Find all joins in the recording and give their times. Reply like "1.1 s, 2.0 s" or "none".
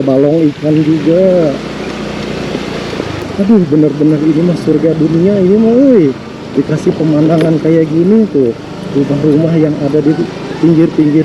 3.2 s